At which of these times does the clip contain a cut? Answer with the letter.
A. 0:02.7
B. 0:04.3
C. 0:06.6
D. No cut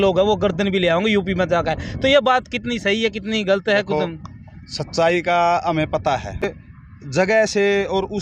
C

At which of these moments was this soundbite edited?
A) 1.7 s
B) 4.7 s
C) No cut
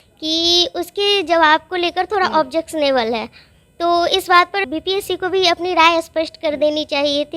B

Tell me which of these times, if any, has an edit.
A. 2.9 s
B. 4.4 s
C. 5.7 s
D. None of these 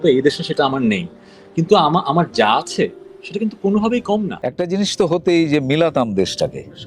B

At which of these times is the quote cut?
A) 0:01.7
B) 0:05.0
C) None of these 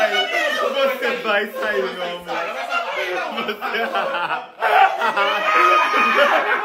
C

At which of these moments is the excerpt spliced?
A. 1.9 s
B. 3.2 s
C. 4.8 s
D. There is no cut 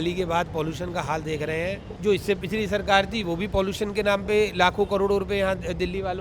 A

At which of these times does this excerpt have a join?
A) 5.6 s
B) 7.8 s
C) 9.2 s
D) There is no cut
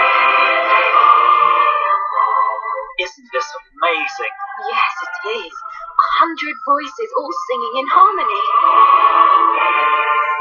C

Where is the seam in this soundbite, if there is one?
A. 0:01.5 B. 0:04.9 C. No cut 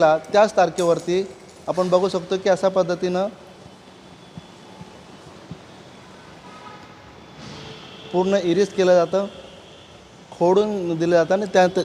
C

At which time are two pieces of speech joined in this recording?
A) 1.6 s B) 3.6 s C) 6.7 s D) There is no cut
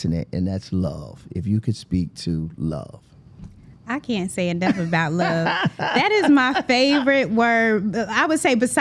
D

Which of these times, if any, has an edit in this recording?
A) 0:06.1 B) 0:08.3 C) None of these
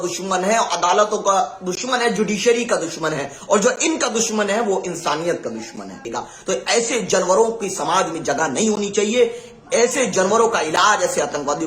A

